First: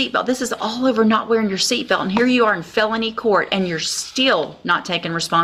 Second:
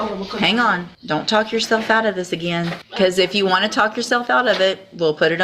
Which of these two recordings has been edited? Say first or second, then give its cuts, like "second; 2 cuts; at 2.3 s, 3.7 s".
second; 2 cuts; at 0.9 s, 2.8 s